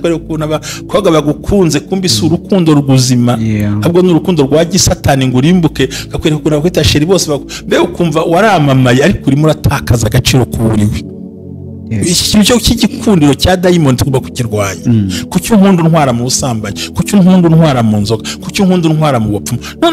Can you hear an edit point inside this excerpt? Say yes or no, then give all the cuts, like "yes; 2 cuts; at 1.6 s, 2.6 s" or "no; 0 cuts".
no; 0 cuts